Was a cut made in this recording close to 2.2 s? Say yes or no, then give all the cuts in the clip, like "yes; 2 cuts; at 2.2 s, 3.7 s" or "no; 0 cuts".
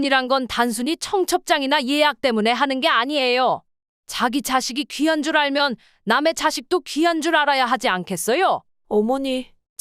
no; 1 cut; at 8.7 s